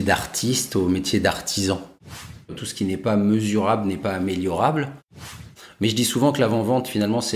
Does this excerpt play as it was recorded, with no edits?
no; 2 cuts; at 2.5 s, 5.4 s

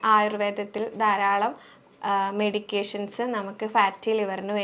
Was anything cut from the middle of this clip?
no; 0 cuts

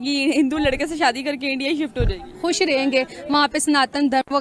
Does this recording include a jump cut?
no; 0 cuts

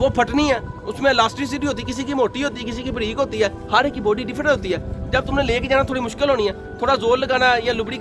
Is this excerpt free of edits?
yes; 0 cuts

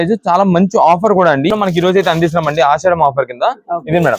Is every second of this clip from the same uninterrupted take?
no; 1 cut; at 1.5 s

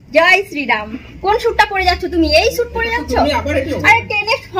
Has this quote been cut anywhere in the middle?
yes; 1 cut; at 1.0 s

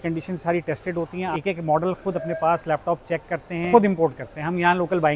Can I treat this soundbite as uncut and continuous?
no; 2 cuts; at 1.3 s, 3.7 s

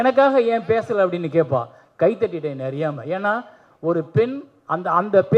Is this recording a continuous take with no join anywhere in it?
yes; 0 cuts

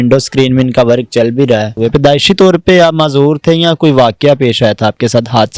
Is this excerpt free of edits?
no; 1 cut; at 1.7 s

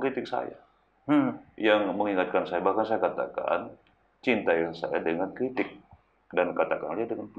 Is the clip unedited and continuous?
yes; 0 cuts

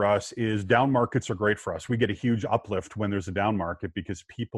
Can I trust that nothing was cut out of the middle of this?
yes; 0 cuts

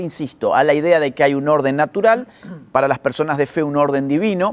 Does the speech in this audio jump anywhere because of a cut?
no; 0 cuts

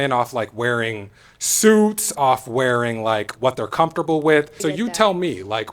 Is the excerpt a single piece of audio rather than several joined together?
no; 1 cut; at 4.5 s

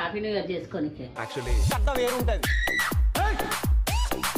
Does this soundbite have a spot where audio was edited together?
yes; 1 cut; at 1.0 s

